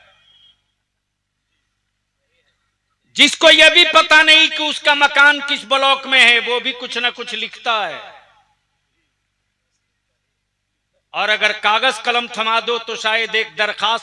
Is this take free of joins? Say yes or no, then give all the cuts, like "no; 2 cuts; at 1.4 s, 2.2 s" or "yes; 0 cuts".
yes; 0 cuts